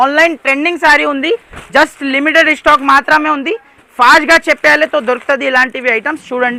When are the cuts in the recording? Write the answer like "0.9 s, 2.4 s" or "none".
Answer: none